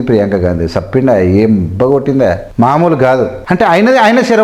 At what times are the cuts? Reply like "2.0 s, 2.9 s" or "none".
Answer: 2.4 s, 3.4 s

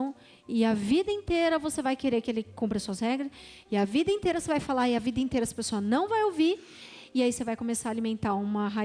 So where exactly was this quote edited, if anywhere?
none

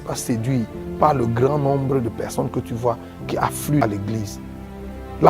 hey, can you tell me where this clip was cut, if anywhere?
3.8 s

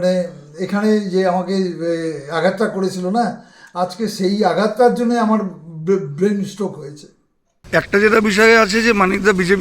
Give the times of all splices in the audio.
7.7 s

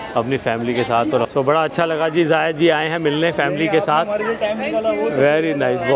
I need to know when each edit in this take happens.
none

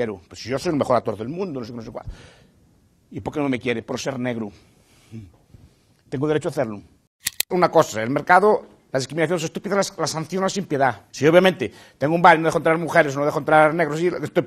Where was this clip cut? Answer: 7.5 s, 11.1 s

